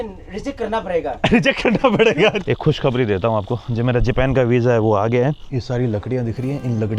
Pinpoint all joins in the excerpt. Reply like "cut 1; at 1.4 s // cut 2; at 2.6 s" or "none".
cut 1; at 2.4 s // cut 2; at 5.5 s